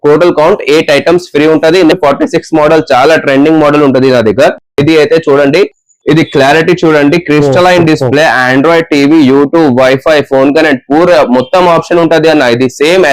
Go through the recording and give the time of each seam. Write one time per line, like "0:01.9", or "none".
0:01.9